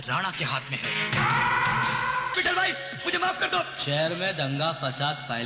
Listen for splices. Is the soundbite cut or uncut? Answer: cut